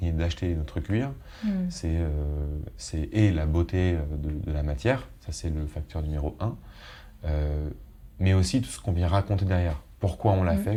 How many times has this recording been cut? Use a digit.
0